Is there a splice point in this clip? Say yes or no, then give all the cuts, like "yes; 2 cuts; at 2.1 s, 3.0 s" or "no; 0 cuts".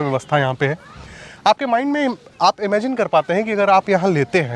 no; 0 cuts